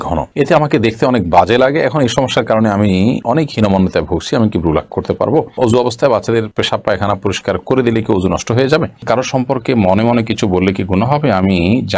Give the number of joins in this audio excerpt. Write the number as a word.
two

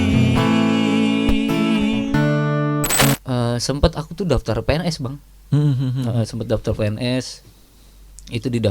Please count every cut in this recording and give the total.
one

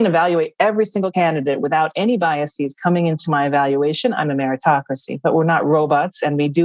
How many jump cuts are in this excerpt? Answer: zero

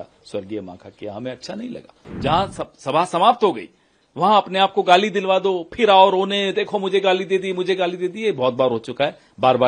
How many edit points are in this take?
one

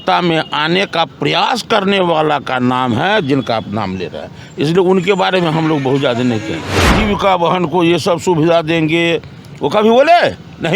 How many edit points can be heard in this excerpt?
one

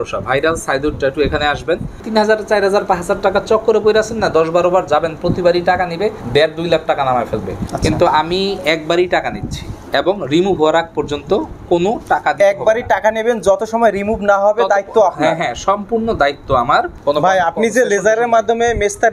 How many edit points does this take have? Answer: three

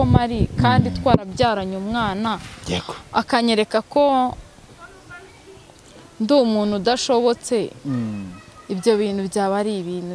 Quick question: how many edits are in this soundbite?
zero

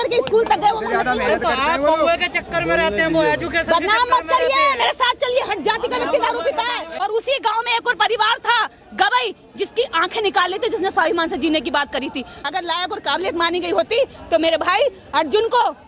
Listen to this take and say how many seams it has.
two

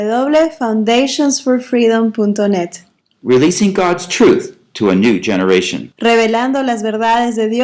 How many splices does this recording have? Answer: zero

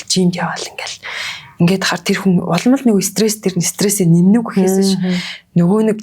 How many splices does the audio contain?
zero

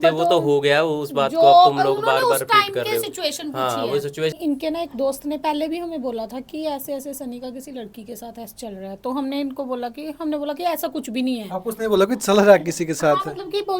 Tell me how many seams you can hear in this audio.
one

